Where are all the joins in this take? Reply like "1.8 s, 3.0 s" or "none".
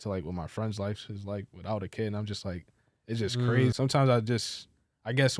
3.7 s

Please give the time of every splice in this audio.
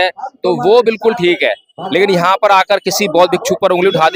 none

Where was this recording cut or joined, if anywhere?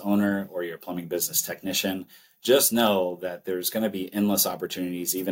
none

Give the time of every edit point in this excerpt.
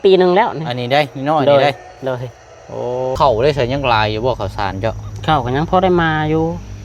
3.2 s

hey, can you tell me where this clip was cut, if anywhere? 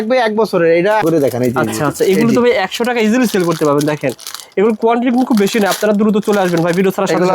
1.0 s

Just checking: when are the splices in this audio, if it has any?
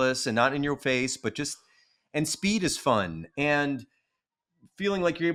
none

